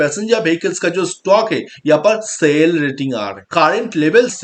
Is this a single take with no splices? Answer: no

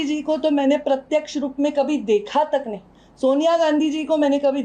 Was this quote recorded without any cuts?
yes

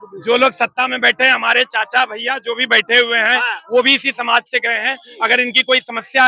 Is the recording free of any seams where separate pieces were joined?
yes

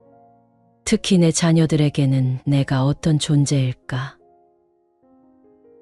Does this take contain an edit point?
no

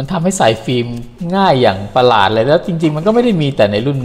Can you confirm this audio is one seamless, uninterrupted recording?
yes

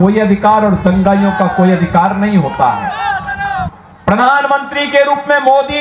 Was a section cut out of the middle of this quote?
yes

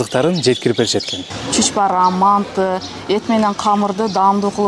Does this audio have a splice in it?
yes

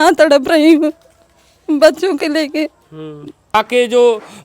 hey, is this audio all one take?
no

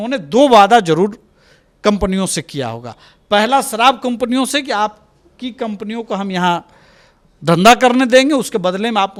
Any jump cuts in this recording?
no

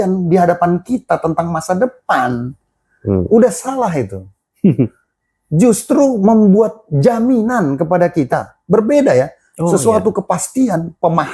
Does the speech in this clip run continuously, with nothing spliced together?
yes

